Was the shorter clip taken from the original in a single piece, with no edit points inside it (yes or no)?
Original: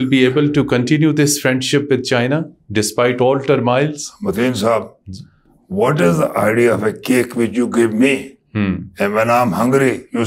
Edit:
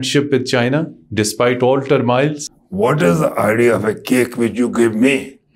no